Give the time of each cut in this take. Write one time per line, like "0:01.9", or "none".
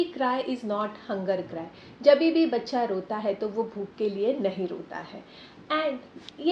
none